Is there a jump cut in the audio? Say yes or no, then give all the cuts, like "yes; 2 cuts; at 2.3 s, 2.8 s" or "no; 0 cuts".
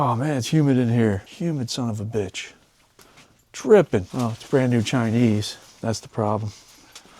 yes; 2 cuts; at 1.3 s, 4.1 s